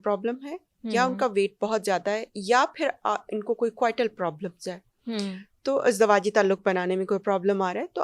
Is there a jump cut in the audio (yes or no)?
no